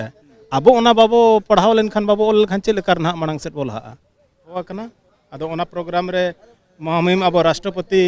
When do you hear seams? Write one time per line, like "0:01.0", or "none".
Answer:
0:04.6